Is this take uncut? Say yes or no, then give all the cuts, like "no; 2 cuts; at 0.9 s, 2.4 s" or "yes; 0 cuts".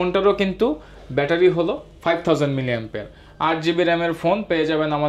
yes; 0 cuts